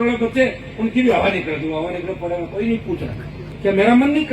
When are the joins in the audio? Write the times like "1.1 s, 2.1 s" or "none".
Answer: 3.4 s

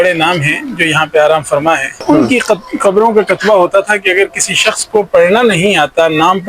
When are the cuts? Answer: 2.0 s

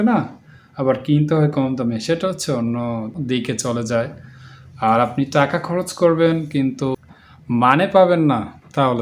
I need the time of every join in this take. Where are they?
3.2 s, 7.0 s

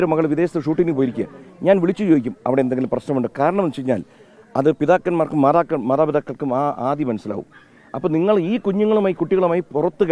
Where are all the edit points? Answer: none

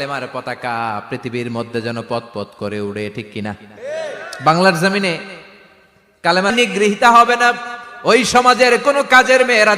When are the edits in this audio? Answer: 6.5 s

